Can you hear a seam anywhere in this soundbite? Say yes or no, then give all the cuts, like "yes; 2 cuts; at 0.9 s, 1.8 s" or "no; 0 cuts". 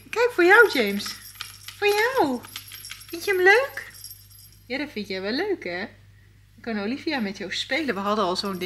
no; 0 cuts